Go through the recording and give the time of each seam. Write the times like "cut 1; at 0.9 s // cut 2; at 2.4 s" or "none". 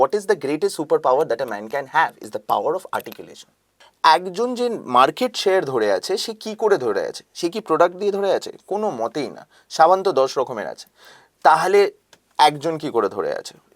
cut 1; at 3.8 s

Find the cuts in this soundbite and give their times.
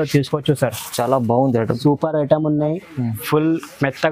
cut 1; at 1.8 s

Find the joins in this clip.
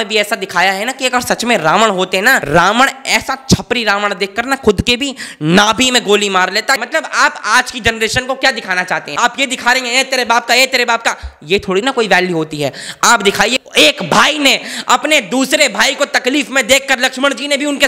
cut 1; at 2.4 s // cut 2; at 6.8 s // cut 3; at 9.1 s // cut 4; at 13.5 s

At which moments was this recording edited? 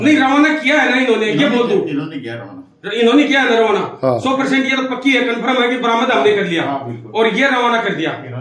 none

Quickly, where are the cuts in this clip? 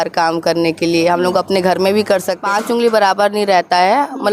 cut 1; at 2.3 s

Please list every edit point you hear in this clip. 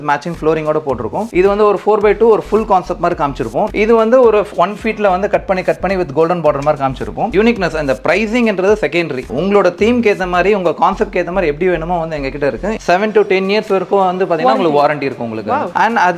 cut 1; at 1.2 s // cut 2; at 3.7 s // cut 3; at 7.3 s // cut 4; at 12.8 s

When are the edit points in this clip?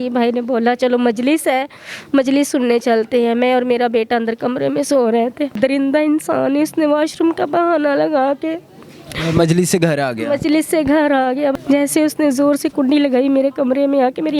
cut 1; at 5.6 s // cut 2; at 11.5 s

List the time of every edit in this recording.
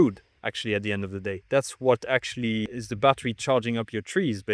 cut 1; at 1.3 s // cut 2; at 2.8 s

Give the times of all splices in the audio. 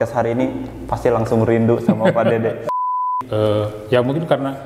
cut 1; at 3.0 s

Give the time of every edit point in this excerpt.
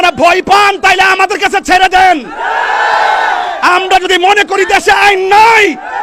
none

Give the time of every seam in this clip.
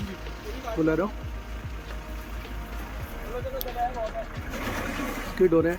none

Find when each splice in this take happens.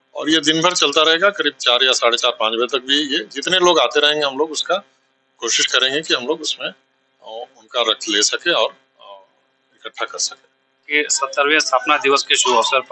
cut 1; at 10.8 s

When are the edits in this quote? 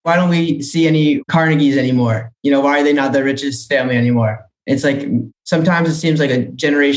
cut 1; at 1.2 s

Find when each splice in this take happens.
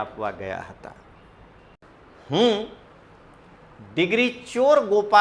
cut 1; at 1.8 s

